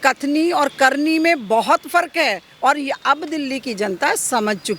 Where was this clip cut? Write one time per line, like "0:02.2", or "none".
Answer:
none